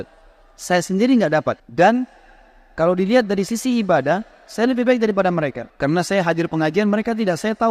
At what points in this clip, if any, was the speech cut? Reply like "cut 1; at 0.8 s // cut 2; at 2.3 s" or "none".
cut 1; at 1.6 s // cut 2; at 5.6 s